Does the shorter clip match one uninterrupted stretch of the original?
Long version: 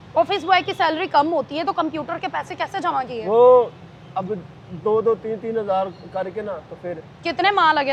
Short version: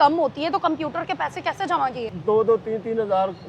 no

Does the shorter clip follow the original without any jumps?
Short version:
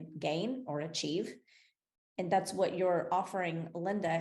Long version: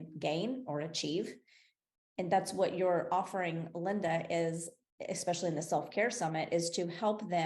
yes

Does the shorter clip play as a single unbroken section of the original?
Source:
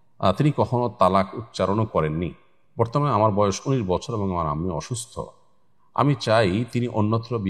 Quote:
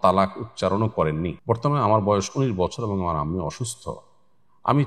no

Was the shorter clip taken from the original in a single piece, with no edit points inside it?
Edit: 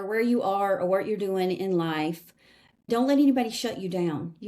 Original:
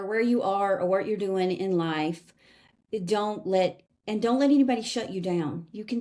no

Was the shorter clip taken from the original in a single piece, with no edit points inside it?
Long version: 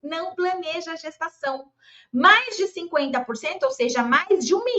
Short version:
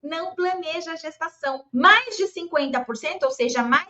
no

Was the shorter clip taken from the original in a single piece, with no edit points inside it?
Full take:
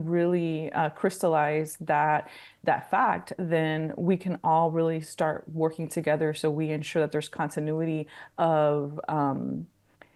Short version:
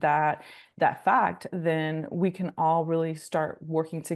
yes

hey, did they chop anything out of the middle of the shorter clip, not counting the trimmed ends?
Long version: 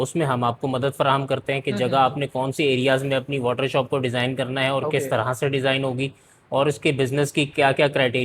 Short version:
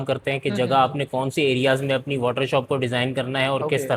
no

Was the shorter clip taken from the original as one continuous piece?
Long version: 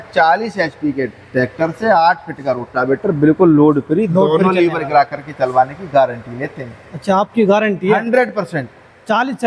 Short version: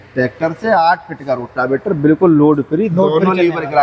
yes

